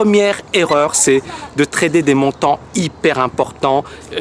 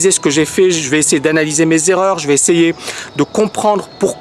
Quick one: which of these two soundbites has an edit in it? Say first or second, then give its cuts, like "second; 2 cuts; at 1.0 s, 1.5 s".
second; 1 cut; at 2.4 s